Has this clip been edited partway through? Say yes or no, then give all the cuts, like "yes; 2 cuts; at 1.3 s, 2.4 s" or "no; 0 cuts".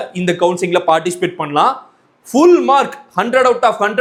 no; 0 cuts